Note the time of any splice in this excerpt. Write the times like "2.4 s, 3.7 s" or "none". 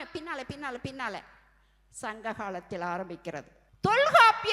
3.6 s